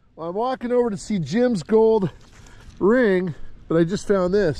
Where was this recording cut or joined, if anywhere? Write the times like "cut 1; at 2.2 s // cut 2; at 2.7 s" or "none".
none